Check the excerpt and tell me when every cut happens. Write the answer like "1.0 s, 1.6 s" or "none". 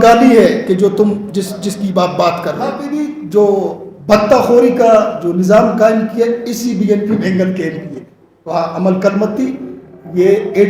2.8 s